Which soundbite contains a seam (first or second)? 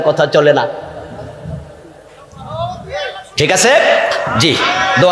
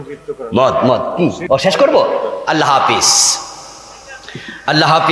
second